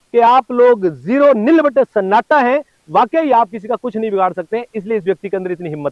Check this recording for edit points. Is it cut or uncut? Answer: uncut